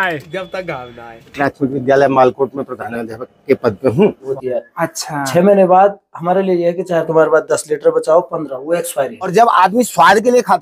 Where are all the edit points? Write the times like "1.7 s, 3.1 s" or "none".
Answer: 1.3 s, 4.3 s, 9.3 s